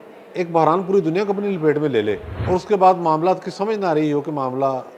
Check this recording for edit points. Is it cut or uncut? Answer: cut